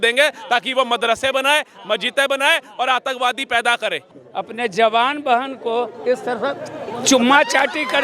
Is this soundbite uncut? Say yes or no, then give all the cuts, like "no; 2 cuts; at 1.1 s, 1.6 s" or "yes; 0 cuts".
no; 1 cut; at 4.1 s